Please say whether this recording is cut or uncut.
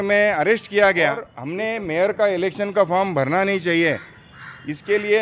cut